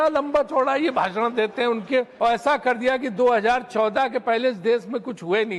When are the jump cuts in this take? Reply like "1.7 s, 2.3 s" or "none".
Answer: 2.1 s